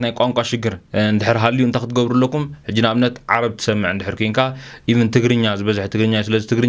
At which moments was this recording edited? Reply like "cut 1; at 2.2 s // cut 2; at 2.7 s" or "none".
none